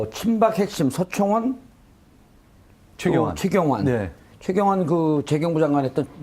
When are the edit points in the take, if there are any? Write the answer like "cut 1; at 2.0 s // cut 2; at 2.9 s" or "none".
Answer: cut 1; at 2.1 s